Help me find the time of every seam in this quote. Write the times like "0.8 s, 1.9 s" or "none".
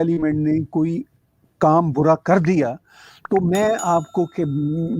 none